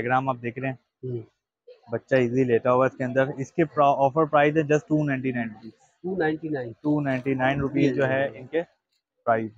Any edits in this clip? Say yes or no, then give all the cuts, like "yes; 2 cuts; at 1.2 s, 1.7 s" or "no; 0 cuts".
no; 0 cuts